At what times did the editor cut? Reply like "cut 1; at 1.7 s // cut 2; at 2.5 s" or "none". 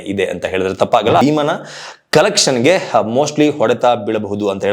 cut 1; at 1.2 s